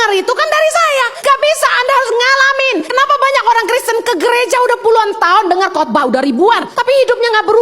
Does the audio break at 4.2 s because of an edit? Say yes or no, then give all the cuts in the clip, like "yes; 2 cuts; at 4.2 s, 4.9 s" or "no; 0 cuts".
no; 3 cuts; at 1.1 s, 2.9 s, 6.7 s